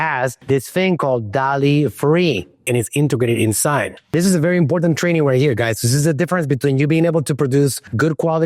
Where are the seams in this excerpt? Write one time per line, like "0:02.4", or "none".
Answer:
0:02.6
0:04.1